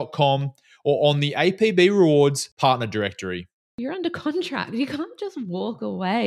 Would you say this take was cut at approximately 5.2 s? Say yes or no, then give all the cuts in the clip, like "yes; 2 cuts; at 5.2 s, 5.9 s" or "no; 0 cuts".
no; 1 cut; at 3.7 s